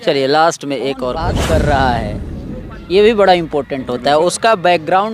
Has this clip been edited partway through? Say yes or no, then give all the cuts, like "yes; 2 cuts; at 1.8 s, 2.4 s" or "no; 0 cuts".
yes; 1 cut; at 1.3 s